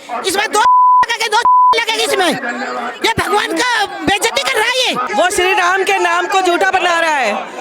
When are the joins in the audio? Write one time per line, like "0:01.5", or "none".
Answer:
0:05.0